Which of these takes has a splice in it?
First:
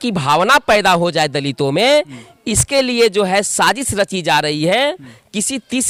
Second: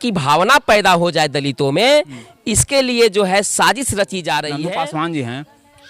second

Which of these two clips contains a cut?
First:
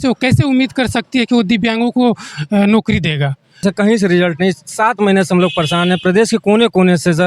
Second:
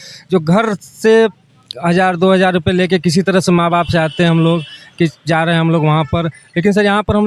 first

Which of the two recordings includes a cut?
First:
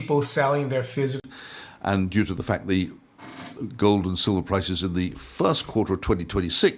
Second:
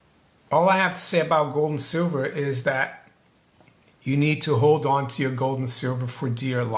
first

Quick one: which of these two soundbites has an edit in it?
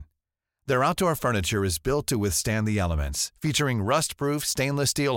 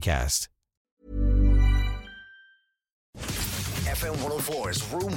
second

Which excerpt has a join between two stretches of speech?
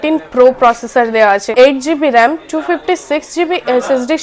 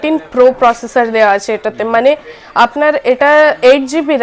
first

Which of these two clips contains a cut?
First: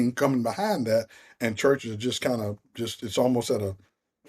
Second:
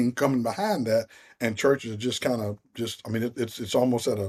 first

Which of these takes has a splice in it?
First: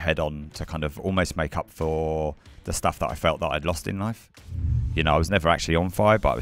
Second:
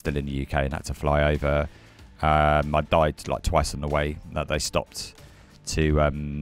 first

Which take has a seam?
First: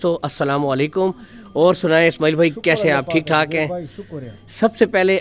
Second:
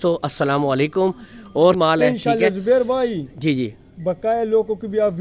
second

